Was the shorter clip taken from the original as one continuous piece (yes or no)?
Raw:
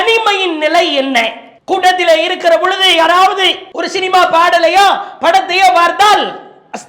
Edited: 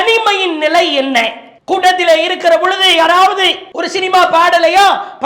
yes